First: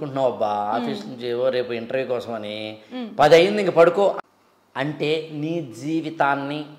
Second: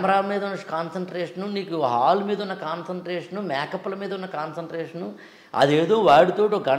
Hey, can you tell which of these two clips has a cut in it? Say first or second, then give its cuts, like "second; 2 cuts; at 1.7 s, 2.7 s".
first; 1 cut; at 4.2 s